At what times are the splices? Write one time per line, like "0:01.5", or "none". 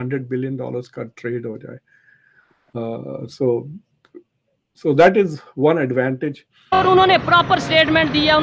0:06.8